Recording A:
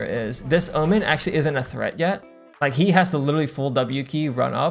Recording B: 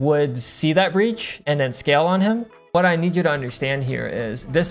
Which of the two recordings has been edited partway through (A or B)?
B